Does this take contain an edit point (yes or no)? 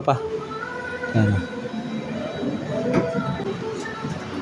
yes